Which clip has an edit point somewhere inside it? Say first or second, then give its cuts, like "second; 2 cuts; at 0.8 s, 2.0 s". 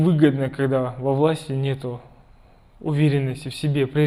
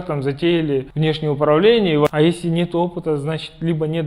second; 2 cuts; at 0.9 s, 2.1 s